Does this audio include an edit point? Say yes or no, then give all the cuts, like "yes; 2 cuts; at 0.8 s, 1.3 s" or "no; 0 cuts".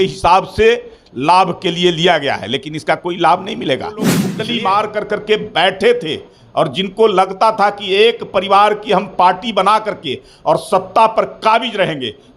yes; 1 cut; at 4.3 s